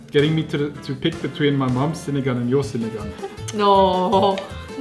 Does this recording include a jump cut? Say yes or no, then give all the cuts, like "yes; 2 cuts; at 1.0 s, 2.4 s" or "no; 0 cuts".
no; 0 cuts